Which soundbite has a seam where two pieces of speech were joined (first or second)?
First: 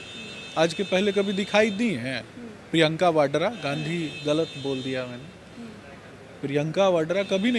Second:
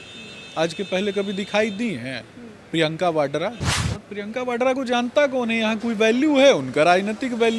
second